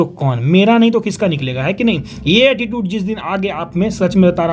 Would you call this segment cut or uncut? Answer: uncut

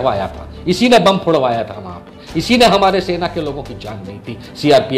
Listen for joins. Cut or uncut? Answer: uncut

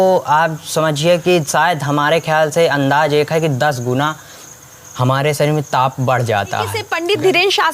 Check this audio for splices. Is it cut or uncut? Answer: cut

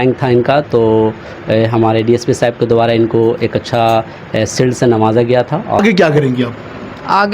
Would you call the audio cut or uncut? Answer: cut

